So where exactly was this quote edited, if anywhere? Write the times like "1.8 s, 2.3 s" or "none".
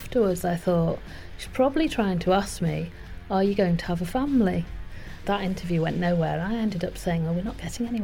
5.2 s